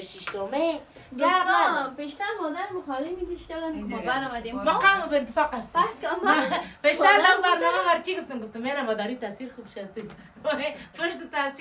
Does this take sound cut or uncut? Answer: uncut